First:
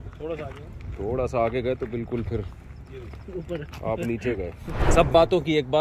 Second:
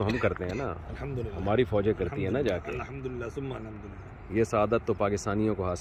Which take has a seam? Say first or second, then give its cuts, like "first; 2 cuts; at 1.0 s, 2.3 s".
first; 1 cut; at 4.8 s